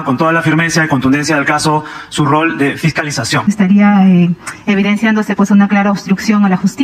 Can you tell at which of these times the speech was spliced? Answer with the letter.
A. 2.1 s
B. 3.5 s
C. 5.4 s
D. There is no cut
B